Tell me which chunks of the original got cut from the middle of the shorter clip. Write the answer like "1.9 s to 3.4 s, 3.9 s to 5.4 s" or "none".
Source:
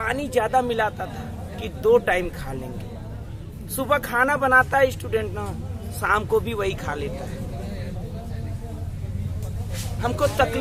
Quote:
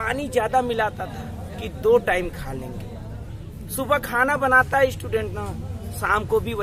none